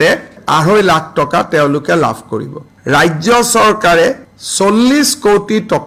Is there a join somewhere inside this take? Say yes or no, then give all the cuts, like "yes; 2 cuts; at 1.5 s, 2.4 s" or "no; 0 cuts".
yes; 1 cut; at 2.7 s